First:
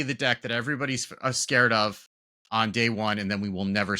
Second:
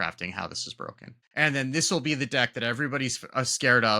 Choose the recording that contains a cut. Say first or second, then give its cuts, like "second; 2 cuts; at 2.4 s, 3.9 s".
second; 1 cut; at 1.2 s